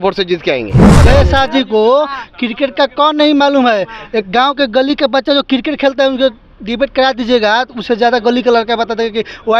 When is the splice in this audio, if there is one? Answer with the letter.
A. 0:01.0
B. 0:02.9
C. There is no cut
A